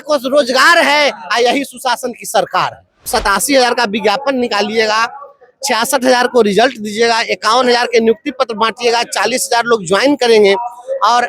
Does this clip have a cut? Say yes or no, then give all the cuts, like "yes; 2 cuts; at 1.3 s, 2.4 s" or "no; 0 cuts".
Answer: yes; 1 cut; at 3.1 s